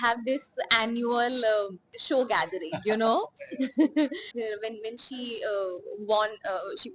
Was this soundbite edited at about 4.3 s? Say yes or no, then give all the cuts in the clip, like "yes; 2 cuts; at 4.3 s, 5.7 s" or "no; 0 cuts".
yes; 1 cut; at 4.3 s